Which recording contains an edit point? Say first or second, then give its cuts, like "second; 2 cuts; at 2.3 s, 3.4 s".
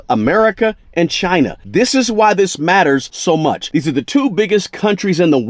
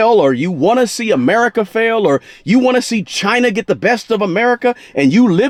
first; 2 cuts; at 1.6 s, 3.5 s